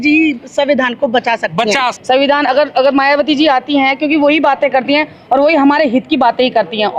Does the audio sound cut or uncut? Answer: cut